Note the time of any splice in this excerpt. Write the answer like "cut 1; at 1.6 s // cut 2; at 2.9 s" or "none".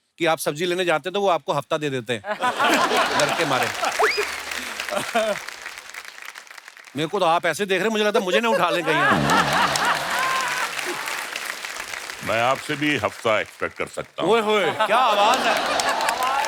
none